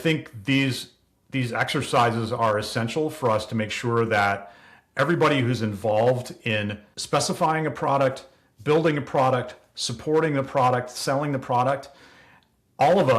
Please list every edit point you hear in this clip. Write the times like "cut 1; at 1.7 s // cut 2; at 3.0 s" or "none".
cut 1; at 6.9 s